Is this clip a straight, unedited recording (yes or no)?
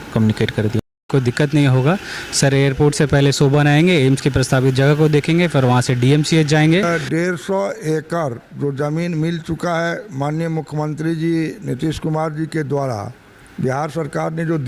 no